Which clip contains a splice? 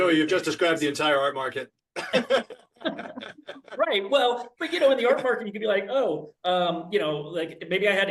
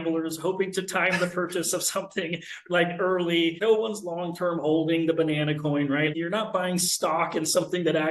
second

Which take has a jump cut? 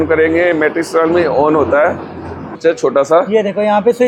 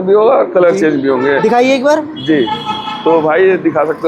first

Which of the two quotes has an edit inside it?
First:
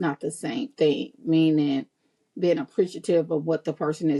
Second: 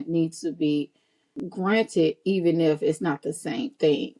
second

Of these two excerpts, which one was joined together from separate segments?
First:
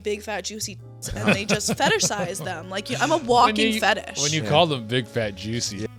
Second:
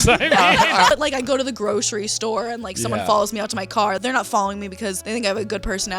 second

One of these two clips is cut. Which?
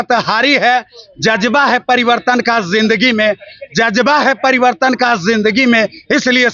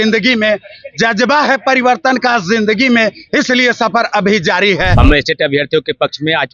second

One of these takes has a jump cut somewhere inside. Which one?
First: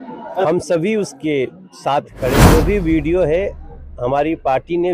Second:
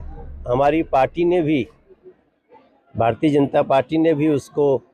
first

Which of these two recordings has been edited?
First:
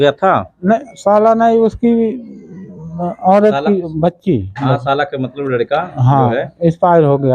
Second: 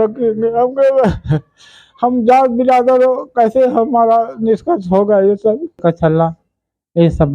second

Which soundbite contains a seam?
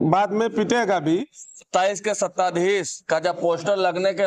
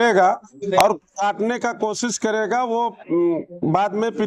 first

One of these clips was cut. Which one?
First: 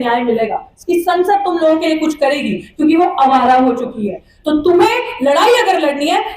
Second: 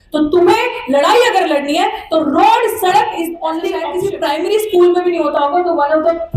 second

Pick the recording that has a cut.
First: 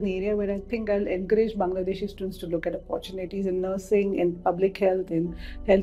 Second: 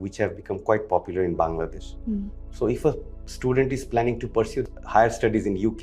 second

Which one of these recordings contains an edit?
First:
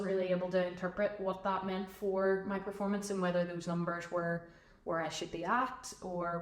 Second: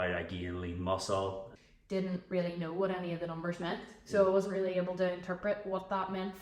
second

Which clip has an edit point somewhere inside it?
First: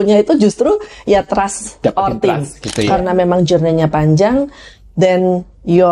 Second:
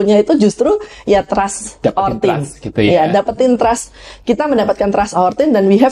first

